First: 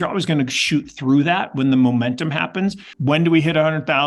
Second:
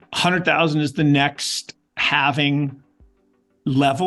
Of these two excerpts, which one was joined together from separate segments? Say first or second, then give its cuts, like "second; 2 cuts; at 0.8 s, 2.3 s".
first; 1 cut; at 2.9 s